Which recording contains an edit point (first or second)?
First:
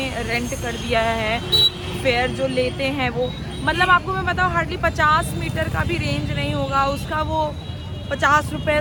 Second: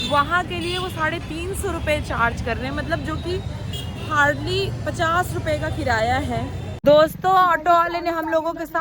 second